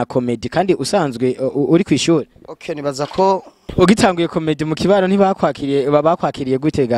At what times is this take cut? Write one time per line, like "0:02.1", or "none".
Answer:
0:03.7